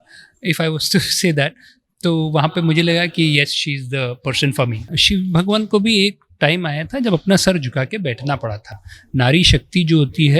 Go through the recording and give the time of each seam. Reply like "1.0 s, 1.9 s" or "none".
5.0 s